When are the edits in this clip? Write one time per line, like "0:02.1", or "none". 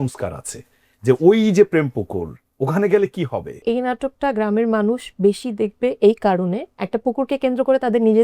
0:03.6
0:06.8